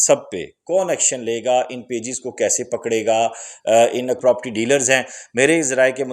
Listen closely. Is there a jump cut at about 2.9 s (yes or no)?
no